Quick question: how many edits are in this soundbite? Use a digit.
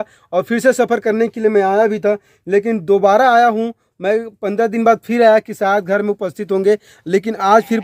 0